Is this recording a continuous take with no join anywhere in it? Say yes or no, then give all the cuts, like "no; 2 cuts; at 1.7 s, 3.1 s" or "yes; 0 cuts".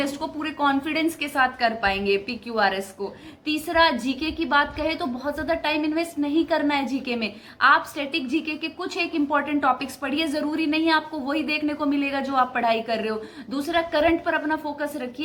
yes; 0 cuts